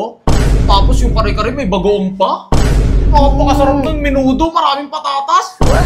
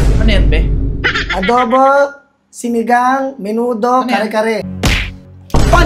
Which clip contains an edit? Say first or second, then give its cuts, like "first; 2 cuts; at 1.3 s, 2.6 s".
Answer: second; 1 cut; at 4.7 s